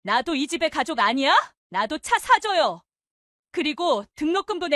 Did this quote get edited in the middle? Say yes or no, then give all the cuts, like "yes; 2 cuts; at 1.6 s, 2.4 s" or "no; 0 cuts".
yes; 1 cut; at 1.6 s